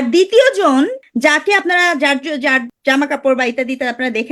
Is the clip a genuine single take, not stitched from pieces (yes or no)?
no